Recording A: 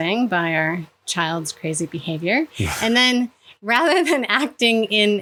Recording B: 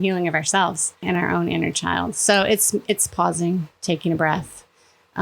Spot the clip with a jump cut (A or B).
B